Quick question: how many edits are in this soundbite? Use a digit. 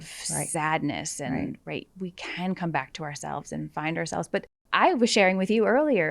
1